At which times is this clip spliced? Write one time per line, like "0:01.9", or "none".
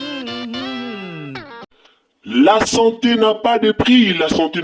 0:01.6